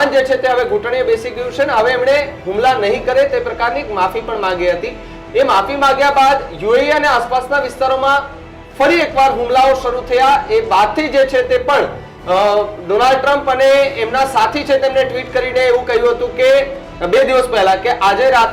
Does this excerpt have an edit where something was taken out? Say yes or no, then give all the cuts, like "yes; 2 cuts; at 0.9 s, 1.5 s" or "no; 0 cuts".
no; 0 cuts